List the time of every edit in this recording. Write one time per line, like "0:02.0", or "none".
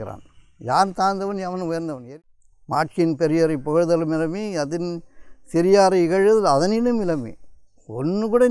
0:02.0

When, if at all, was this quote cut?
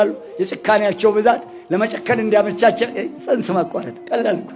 none

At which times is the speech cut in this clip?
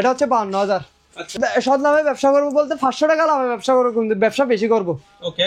0:01.3

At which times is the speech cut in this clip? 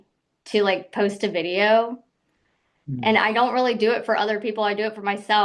none

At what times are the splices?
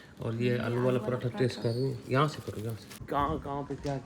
0:02.9

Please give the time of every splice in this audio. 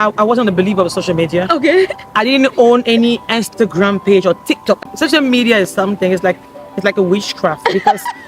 0:04.8

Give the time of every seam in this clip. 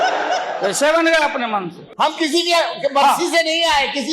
0:01.8

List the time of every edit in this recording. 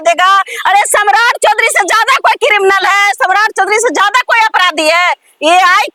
none

